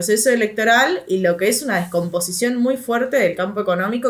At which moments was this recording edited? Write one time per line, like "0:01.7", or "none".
none